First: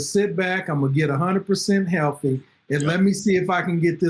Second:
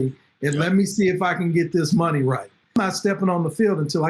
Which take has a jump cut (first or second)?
second